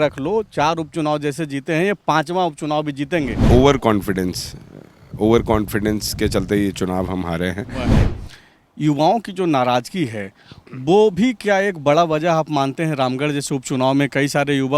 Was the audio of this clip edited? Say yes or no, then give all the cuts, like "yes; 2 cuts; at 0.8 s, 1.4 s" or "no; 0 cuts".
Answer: yes; 2 cuts; at 3.4 s, 8.0 s